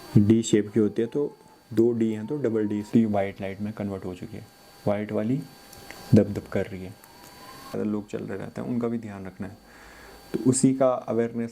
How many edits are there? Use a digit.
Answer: 2